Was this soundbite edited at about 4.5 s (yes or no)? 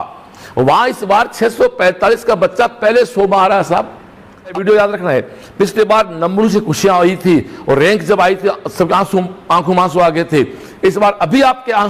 yes